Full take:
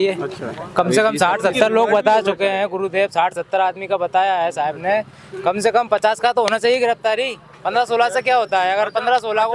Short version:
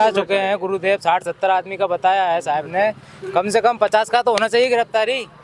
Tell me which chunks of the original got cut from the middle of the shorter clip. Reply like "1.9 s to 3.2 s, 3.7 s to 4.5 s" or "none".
none